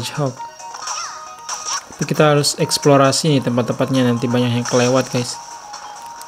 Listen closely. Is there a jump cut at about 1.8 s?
yes; 1 cut; at 1.8 s

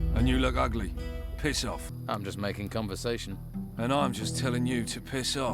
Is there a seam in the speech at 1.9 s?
yes; 1 cut; at 1.9 s

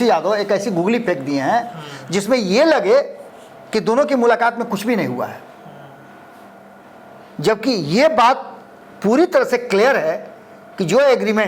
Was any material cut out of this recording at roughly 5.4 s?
no; 0 cuts

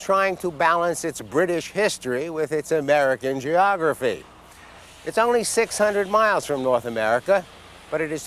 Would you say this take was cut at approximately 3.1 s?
no; 1 cut; at 1.7 s

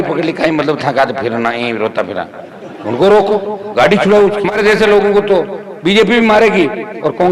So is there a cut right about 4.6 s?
yes; 1 cut; at 4.6 s

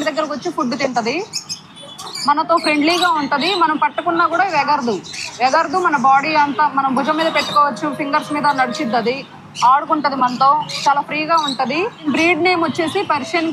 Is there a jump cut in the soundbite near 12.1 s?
yes; 1 cut; at 12.1 s

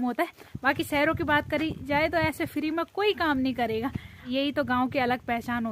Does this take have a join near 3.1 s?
no; 1 cut; at 4.3 s

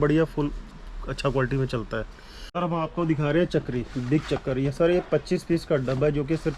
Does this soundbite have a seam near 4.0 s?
no; 1 cut; at 2.4 s

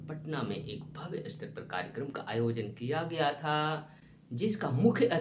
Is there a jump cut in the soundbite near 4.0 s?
no; 0 cuts

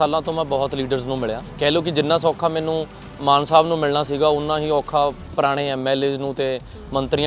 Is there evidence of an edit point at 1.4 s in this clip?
yes; 1 cut; at 1.4 s

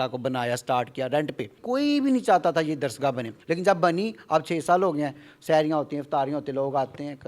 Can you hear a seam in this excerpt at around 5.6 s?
no; 2 cuts; at 1.6 s, 3.3 s

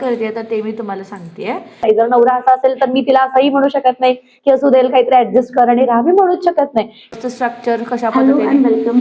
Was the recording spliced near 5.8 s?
no; 2 cuts; at 1.8 s, 7.1 s

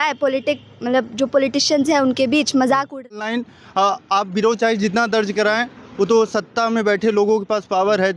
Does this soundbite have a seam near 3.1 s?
yes; 1 cut; at 3.1 s

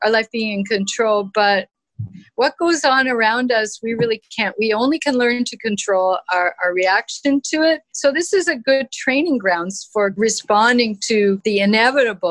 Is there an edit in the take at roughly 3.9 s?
no; 3 cuts; at 7.9 s, 10.1 s, 11.4 s

